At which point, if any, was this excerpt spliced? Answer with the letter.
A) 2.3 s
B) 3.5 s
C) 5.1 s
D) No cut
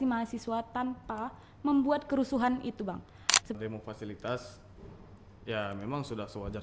B